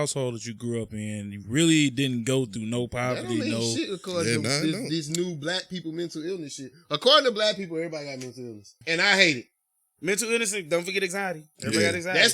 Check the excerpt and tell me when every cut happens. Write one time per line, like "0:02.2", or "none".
0:08.8